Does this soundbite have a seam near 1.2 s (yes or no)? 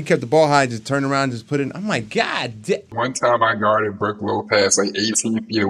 no